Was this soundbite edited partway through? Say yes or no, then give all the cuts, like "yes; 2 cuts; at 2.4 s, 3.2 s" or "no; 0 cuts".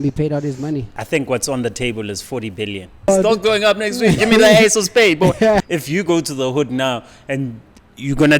yes; 3 cuts; at 0.9 s, 3.1 s, 5.6 s